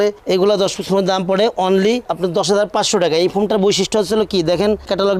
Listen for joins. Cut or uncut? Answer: uncut